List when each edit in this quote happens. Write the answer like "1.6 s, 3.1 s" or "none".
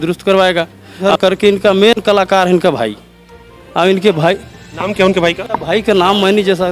1.0 s